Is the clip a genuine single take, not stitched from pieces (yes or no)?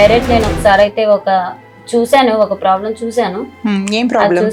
yes